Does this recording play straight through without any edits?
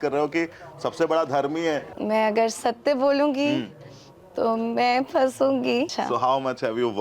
no; 2 cuts; at 1.9 s, 5.9 s

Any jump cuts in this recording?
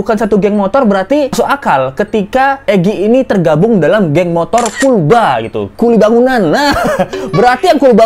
no; 0 cuts

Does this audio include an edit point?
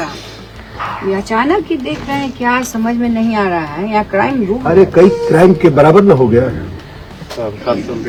no; 0 cuts

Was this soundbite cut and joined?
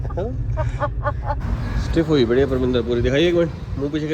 yes; 1 cut; at 1.4 s

